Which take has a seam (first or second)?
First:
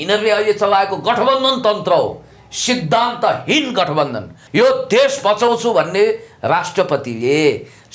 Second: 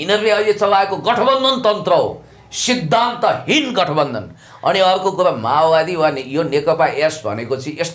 first